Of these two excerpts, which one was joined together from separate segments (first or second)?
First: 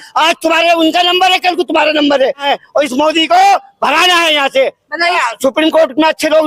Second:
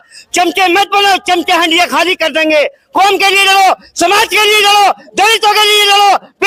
first